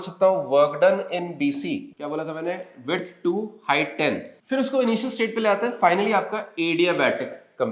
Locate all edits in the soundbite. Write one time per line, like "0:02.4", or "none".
0:01.9
0:04.3

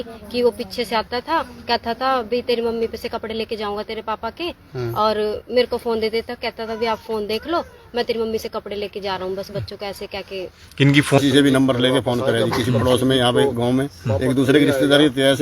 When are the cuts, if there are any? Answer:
0:11.2

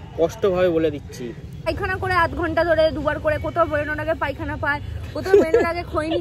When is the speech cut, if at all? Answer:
0:01.7

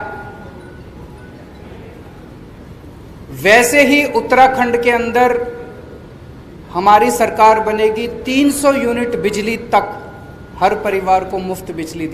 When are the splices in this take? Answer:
none

